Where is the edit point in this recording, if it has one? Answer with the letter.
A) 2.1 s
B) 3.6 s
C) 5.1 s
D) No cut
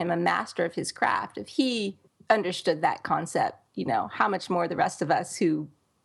A